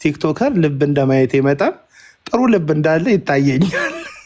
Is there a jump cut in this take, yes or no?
no